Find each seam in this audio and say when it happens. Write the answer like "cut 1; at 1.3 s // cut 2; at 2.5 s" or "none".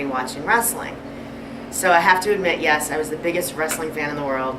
cut 1; at 2.9 s